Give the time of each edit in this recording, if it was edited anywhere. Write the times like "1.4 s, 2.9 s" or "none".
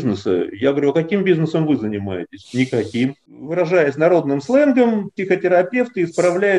3.3 s